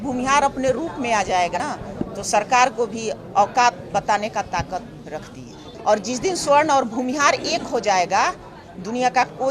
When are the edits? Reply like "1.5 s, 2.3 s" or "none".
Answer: 1.5 s, 5.7 s

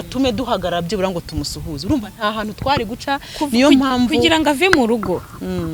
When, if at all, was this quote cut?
none

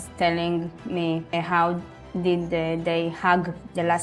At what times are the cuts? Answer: none

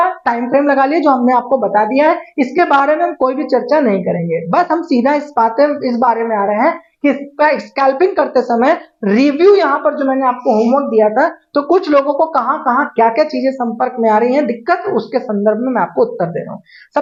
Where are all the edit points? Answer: none

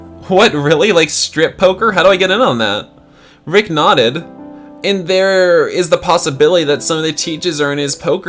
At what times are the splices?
none

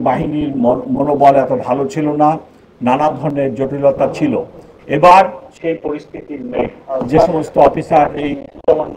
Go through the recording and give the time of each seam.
5.5 s, 6.8 s

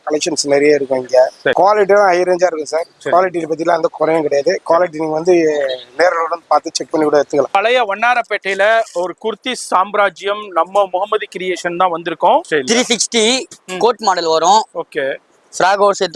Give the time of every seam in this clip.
1.5 s, 7.5 s, 12.4 s

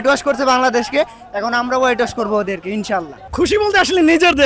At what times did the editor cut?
3.2 s

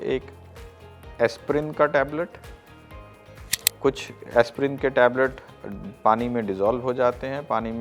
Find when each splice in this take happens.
none

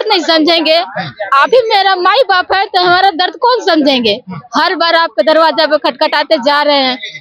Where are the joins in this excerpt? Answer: none

